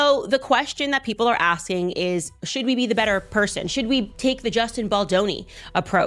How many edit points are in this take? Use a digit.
0